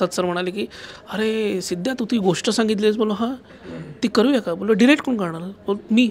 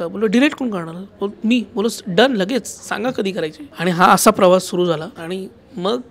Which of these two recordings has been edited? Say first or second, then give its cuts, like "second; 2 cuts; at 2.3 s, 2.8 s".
second; 2 cuts; at 3.7 s, 5.1 s